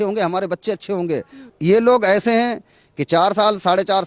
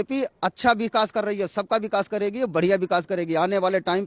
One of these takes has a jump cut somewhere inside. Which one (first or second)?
first